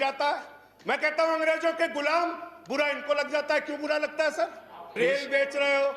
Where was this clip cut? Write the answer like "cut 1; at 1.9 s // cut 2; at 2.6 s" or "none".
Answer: cut 1; at 5.1 s